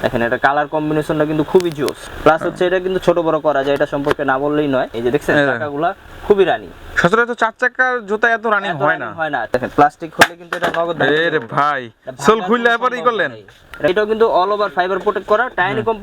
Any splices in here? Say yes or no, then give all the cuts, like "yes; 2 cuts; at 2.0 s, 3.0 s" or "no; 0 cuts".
yes; 4 cuts; at 2.1 s, 4.9 s, 9.5 s, 13.9 s